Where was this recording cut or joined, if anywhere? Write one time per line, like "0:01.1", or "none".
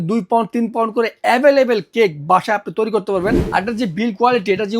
0:03.4